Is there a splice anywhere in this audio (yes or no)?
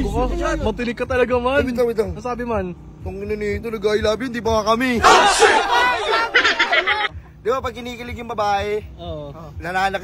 yes